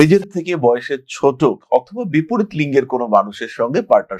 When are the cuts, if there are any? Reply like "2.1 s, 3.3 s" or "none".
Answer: none